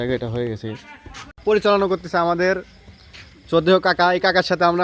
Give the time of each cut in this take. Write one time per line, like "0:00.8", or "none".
0:01.4